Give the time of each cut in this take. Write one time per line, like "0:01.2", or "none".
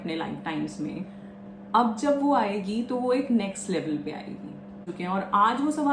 0:04.9